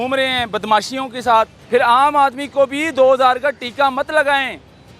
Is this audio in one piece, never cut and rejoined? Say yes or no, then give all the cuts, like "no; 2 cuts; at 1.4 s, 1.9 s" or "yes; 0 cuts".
no; 1 cut; at 1.6 s